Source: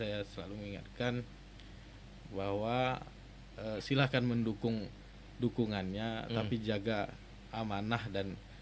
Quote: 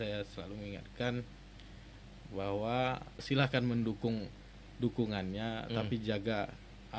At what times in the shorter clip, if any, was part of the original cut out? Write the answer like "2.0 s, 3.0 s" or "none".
3.2 s